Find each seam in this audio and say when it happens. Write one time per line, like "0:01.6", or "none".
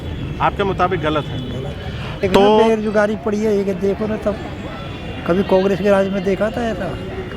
0:02.6